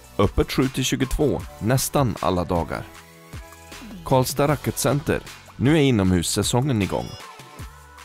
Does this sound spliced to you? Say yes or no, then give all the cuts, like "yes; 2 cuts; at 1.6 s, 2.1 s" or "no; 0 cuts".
yes; 1 cut; at 7.1 s